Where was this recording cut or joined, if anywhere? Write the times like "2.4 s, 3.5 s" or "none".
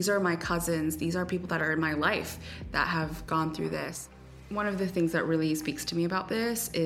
4.1 s